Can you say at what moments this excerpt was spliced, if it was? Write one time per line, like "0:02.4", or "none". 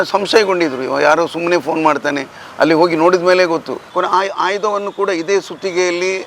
0:03.9